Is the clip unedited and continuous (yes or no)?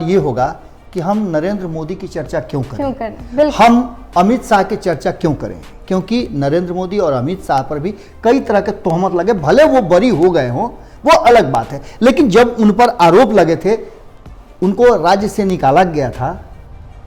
yes